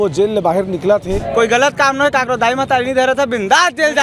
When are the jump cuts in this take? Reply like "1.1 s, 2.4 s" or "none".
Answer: 1.2 s